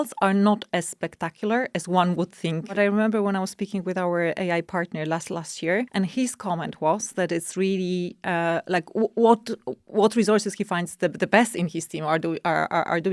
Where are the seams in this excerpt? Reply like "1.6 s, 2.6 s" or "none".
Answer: 2.7 s, 5.9 s